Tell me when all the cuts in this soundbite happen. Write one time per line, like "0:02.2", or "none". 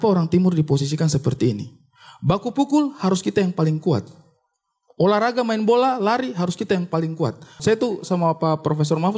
0:07.6